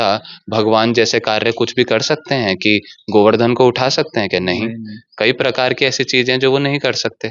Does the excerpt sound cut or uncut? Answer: uncut